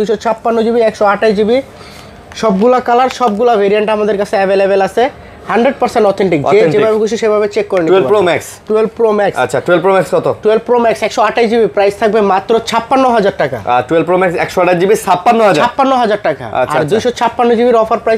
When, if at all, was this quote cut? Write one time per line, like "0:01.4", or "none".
none